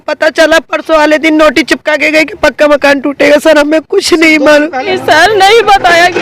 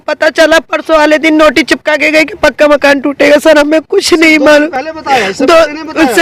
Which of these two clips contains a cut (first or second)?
first